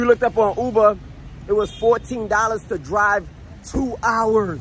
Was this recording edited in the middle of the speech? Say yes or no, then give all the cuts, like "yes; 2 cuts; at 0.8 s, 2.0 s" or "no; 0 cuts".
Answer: no; 0 cuts